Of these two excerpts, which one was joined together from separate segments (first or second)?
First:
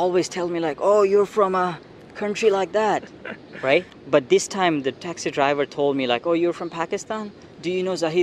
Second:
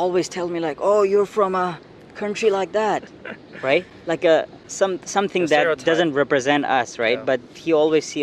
first